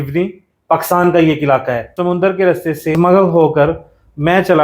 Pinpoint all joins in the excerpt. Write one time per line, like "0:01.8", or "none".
0:01.8
0:03.0